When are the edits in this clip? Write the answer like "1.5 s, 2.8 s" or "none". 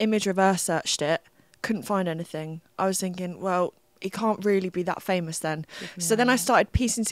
none